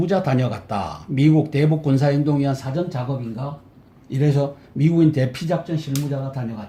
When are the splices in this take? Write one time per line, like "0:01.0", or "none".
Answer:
none